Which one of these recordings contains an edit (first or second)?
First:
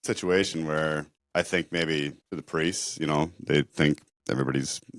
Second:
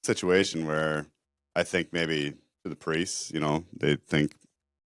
first